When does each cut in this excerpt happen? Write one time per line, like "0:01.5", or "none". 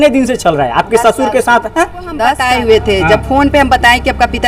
0:02.4